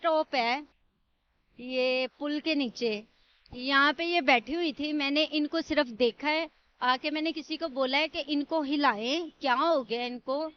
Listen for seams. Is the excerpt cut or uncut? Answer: uncut